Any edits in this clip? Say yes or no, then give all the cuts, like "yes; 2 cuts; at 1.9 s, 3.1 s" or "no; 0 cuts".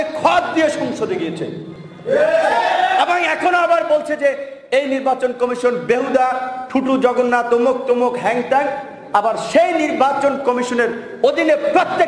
no; 0 cuts